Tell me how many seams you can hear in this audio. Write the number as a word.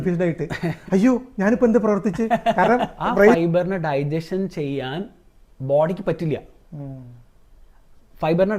one